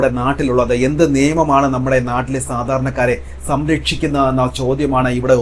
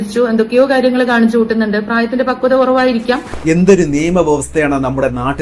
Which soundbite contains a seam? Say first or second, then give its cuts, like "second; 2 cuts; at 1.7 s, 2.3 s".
second; 1 cut; at 3.3 s